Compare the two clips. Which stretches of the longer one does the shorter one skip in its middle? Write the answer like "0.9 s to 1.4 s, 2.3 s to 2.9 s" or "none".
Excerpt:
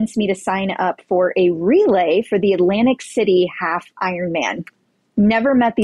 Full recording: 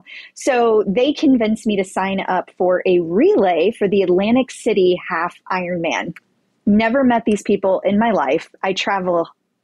none